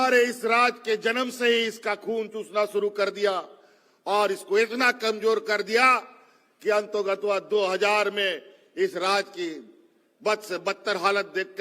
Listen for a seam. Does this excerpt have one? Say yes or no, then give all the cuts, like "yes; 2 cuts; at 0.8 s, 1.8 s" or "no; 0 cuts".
no; 0 cuts